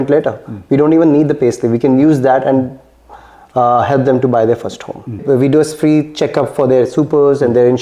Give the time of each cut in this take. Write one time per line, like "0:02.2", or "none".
0:05.2